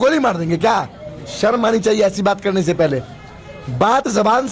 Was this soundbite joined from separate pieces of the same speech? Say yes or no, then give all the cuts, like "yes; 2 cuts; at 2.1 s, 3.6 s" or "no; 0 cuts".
no; 0 cuts